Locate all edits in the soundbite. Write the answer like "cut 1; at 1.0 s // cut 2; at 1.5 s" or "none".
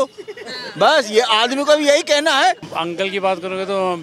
cut 1; at 2.7 s